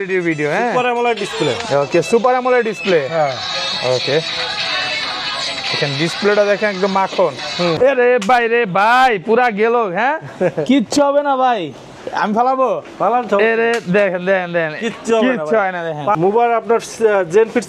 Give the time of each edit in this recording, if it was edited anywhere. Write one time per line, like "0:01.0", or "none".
0:07.8
0:16.2